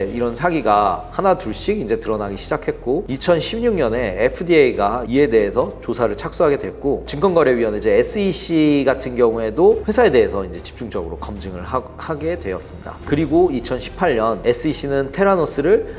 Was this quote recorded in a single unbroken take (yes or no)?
yes